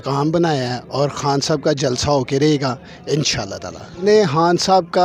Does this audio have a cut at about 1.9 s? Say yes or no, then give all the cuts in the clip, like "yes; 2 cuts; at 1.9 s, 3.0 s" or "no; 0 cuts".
no; 1 cut; at 4.0 s